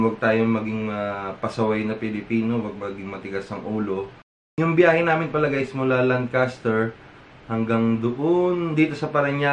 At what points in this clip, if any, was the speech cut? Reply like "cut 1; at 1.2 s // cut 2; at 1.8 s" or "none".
cut 1; at 4.5 s